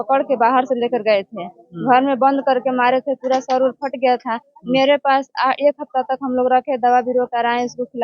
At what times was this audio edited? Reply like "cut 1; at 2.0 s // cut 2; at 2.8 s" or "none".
none